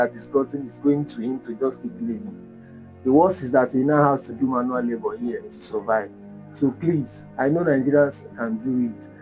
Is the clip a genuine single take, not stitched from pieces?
yes; 0 cuts

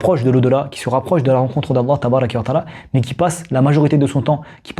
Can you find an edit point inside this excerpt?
no; 0 cuts

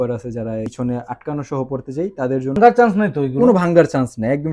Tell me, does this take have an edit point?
yes; 1 cut; at 2.6 s

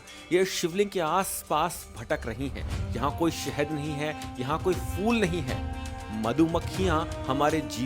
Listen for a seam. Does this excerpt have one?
no; 0 cuts

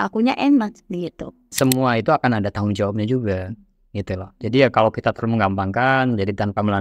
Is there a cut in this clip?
yes; 1 cut; at 1.5 s

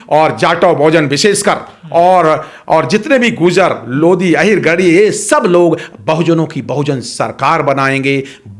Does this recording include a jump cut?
no; 0 cuts

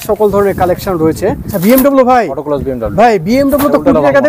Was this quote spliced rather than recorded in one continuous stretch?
yes; 1 cut; at 1.5 s

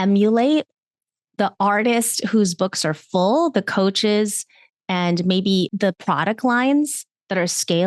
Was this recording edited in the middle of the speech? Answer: no; 0 cuts

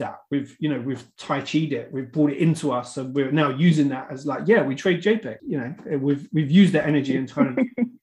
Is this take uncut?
no; 2 cuts; at 1.1 s, 5.4 s

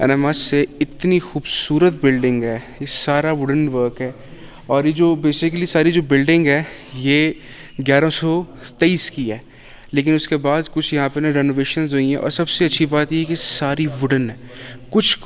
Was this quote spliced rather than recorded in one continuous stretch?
no; 0 cuts

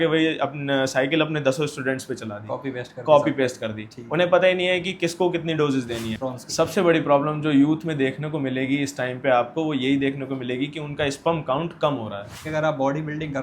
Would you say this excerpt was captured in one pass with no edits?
no; 2 cuts; at 6.1 s, 12.4 s

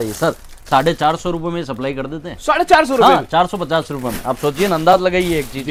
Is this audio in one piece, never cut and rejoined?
yes; 0 cuts

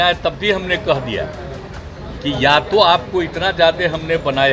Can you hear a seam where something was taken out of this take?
no; 0 cuts

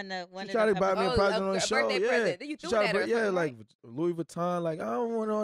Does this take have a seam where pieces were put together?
no; 0 cuts

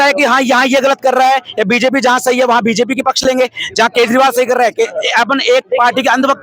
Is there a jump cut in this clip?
no; 0 cuts

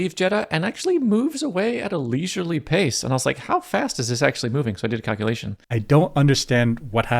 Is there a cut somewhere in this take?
yes; 1 cut; at 5.5 s

